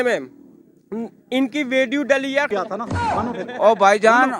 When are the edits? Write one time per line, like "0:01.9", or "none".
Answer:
0:02.5